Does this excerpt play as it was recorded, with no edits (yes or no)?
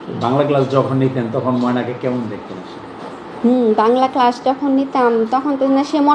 yes